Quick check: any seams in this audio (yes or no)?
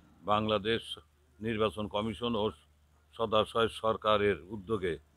no